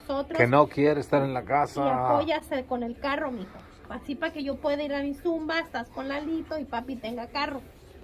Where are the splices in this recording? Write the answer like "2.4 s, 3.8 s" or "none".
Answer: none